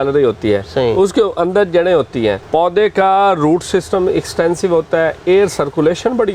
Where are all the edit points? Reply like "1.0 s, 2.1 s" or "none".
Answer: 2.4 s